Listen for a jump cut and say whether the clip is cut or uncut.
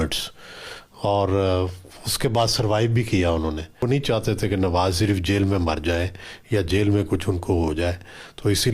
cut